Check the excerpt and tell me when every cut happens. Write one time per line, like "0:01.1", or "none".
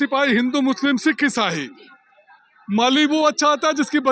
none

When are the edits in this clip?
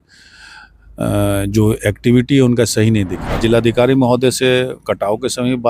0:03.2

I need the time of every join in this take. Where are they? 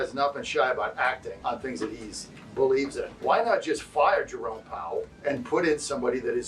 0:01.4
0:03.1
0:05.1

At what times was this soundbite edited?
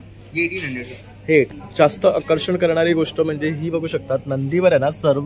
0:01.5

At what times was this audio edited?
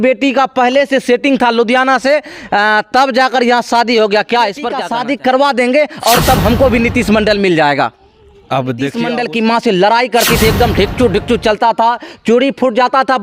0:04.8
0:09.0

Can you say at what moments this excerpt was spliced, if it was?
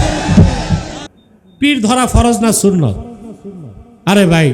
0:01.0

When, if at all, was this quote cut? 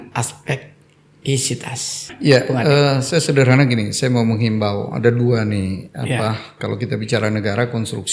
0:02.1

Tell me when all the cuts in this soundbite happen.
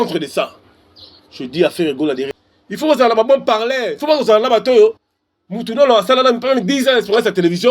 0:02.4

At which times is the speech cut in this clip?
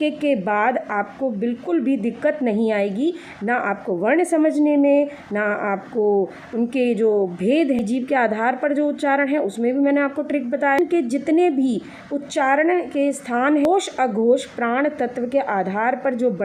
0:07.8
0:10.8
0:13.7

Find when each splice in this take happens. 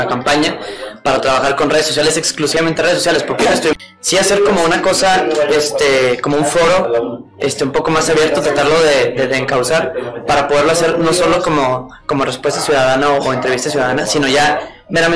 0:03.7

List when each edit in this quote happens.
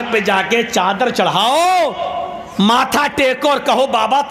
none

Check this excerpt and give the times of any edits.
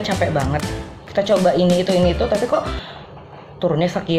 0:01.0

